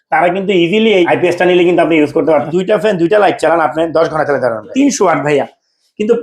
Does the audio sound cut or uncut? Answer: cut